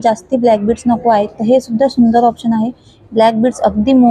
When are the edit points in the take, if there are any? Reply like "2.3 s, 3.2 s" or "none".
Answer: none